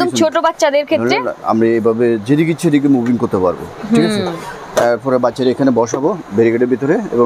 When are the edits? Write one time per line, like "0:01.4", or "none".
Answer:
none